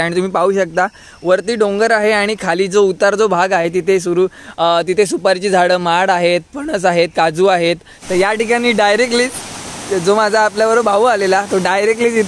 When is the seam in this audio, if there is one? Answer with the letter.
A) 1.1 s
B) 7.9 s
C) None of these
B